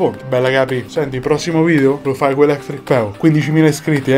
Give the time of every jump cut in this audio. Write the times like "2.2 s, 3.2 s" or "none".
none